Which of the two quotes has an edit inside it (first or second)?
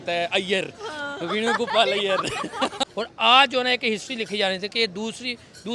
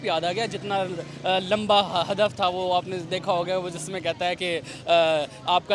first